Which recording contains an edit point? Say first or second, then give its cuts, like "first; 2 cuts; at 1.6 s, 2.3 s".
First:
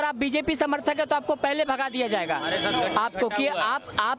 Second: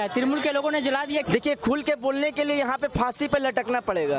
second; 1 cut; at 1.3 s